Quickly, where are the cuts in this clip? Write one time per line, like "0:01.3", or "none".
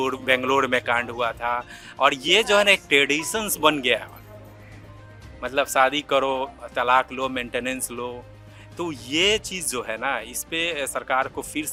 none